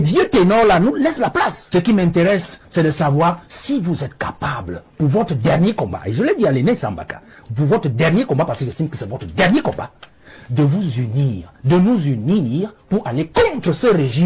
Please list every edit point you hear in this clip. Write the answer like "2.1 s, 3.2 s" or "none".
1.6 s